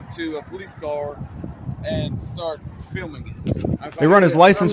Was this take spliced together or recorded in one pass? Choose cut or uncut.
uncut